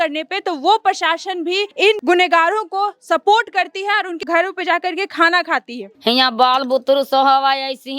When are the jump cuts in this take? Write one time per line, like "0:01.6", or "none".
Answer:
0:01.9
0:05.9